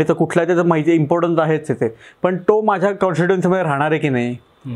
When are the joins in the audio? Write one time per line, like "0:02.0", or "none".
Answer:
none

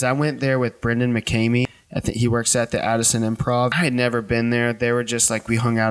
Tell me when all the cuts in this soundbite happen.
0:01.8
0:03.7

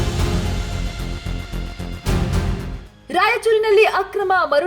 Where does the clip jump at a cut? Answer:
0:02.9

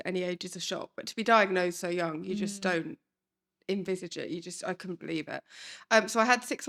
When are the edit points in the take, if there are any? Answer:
none

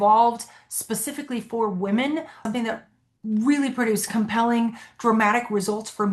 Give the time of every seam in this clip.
0:02.4

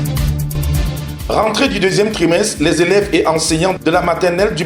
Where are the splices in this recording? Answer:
0:01.1

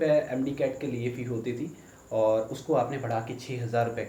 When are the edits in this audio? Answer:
none

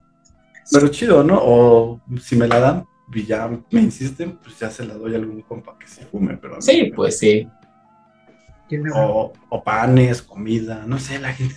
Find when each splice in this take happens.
none

